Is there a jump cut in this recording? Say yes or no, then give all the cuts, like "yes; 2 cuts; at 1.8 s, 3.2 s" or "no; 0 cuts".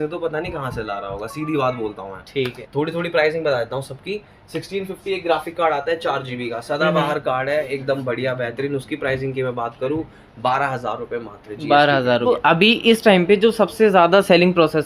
yes; 2 cuts; at 2.6 s, 12.3 s